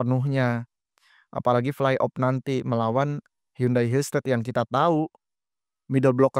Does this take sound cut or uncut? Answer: uncut